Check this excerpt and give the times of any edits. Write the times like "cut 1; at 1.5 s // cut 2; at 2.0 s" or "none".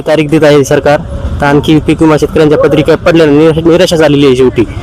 none